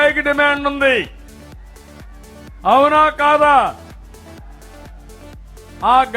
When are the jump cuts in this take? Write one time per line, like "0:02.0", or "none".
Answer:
0:01.2
0:02.6

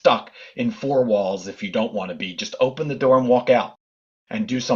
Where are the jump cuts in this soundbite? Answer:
none

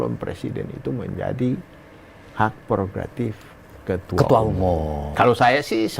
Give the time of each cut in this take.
0:05.0

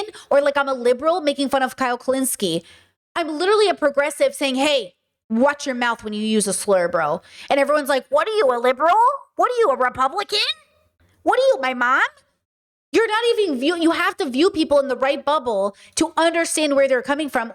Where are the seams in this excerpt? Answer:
none

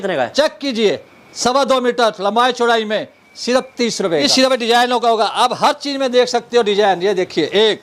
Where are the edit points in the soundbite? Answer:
0:04.2

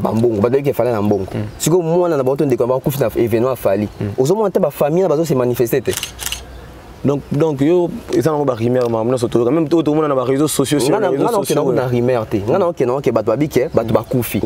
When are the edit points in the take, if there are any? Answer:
none

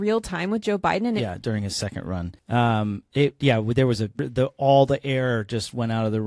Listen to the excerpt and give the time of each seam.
0:01.2
0:02.4
0:04.2

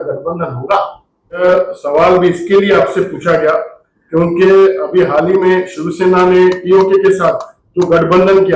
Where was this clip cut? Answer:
0:01.4

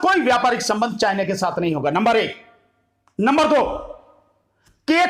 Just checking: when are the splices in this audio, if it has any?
none

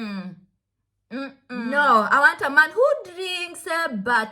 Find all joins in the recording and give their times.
0:01.7

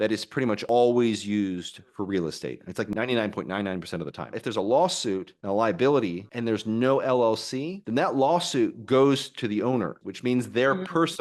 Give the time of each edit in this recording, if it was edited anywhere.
0:04.3
0:10.0

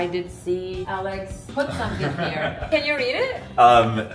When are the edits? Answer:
0:01.1
0:02.7

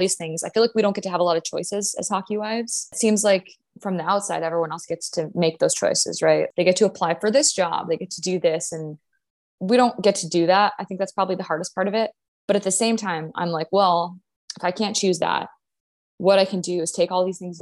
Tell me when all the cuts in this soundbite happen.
0:02.9
0:06.5

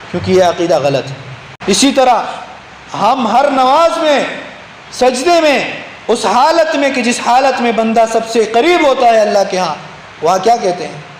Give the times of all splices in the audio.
0:01.6

